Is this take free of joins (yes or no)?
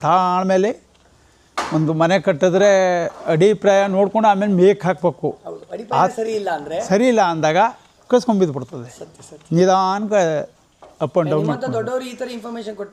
yes